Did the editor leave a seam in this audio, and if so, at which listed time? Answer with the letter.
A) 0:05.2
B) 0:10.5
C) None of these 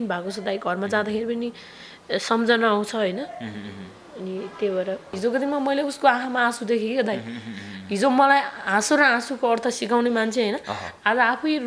A